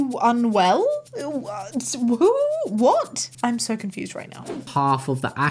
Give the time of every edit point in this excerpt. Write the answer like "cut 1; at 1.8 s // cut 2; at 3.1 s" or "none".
cut 1; at 3.3 s // cut 2; at 4.5 s